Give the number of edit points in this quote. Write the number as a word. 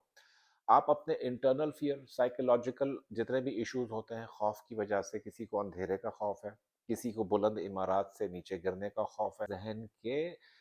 one